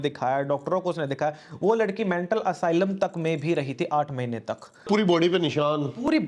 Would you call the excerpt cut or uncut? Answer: cut